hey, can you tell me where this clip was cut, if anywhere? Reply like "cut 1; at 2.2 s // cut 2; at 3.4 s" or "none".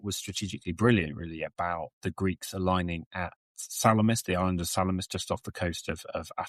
none